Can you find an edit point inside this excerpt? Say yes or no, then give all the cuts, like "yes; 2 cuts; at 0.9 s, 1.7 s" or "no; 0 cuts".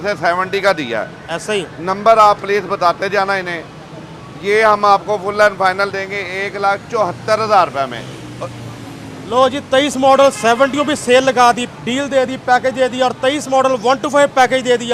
no; 0 cuts